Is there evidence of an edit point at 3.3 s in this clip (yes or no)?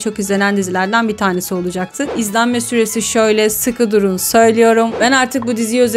no